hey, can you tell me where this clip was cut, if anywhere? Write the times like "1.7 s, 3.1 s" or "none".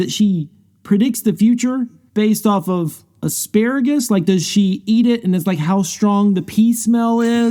none